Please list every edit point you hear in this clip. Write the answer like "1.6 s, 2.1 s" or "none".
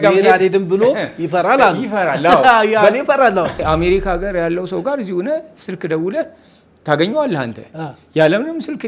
3.6 s